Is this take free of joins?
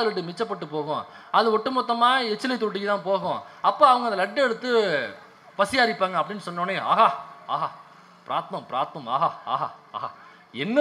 yes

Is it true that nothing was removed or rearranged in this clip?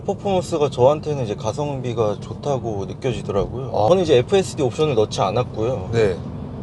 no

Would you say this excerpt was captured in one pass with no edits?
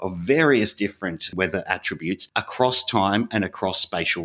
no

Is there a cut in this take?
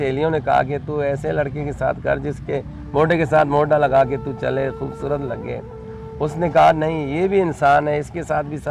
no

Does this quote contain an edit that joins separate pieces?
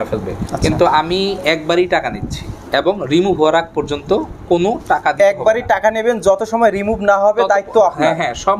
no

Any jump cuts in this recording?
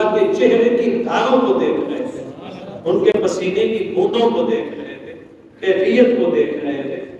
no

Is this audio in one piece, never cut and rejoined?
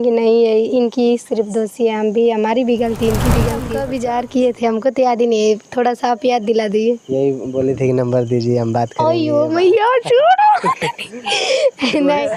no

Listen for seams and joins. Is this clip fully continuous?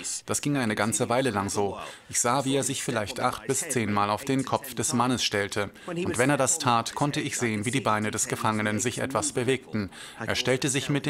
yes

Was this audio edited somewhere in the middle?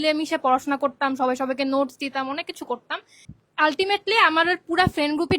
yes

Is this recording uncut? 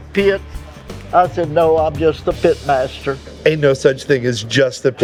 yes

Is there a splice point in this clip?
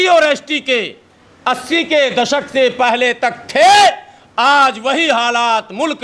no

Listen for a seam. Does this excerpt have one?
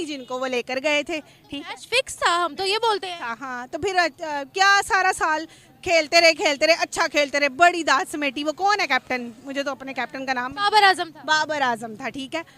no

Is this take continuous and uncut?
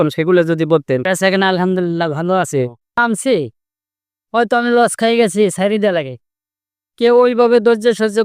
no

